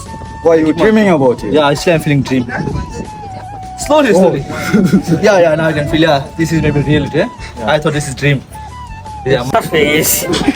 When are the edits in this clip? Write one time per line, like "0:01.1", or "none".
none